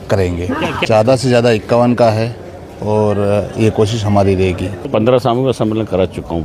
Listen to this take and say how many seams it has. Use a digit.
2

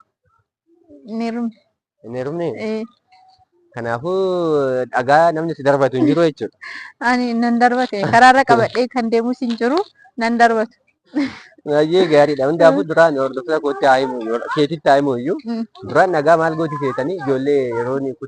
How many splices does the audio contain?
0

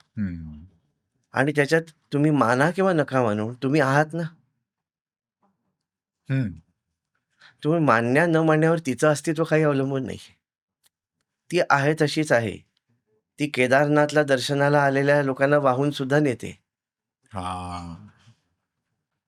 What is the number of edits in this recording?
0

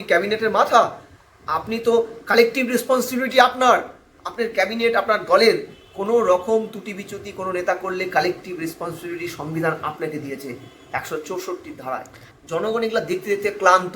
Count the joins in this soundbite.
1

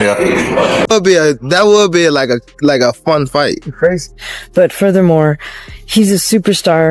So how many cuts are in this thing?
2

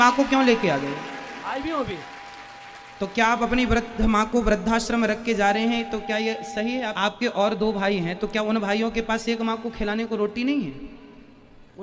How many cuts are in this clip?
1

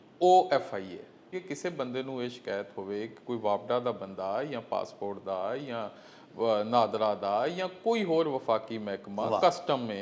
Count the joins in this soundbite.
1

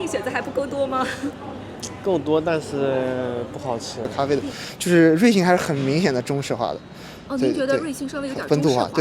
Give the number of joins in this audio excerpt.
1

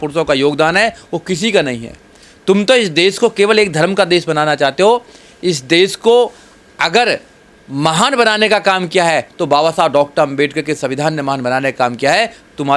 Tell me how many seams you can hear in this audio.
0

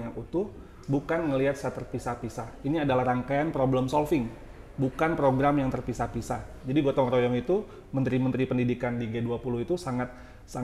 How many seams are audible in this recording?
1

